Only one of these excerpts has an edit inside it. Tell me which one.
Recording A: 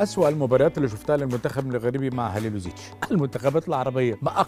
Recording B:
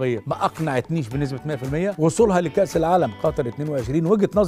A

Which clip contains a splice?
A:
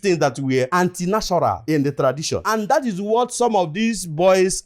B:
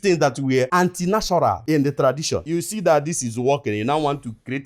A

